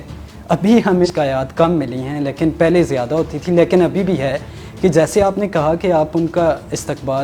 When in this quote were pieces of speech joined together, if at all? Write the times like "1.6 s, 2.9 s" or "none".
1.1 s